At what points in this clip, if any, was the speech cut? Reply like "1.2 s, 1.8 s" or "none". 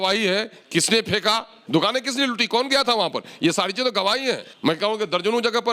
1.5 s, 4.5 s